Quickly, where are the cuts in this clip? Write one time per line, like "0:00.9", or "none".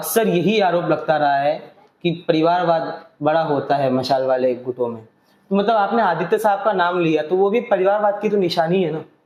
none